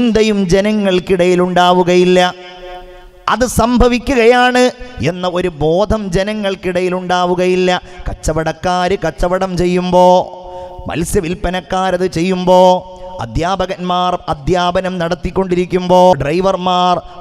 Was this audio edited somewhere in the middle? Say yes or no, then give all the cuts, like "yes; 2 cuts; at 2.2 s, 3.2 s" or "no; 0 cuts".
yes; 1 cut; at 16.1 s